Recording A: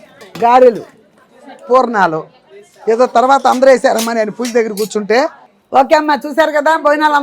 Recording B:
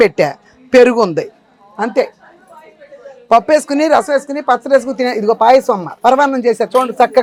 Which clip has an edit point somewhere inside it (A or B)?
A